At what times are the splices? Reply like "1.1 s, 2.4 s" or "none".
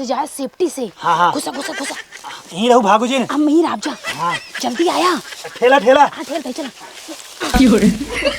7.5 s